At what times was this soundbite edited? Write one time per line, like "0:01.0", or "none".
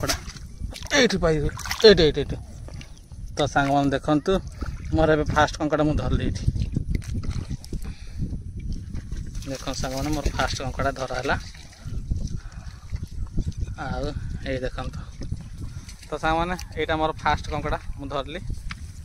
none